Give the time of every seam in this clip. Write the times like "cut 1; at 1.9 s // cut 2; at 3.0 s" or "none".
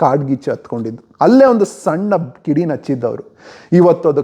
none